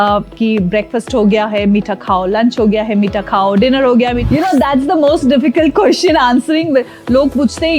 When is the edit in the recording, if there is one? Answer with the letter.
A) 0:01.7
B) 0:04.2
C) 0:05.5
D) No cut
B